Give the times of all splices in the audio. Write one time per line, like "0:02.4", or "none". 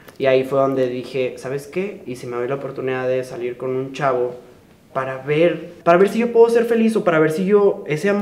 0:05.7